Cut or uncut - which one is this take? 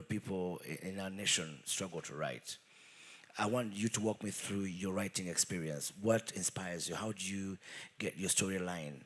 uncut